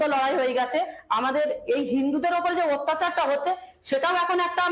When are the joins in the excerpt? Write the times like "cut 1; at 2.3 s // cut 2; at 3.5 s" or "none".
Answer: none